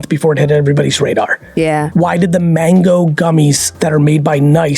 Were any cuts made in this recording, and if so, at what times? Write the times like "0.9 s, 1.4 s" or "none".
1.9 s, 3.7 s